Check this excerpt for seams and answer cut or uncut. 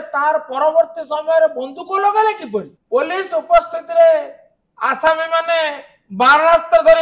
cut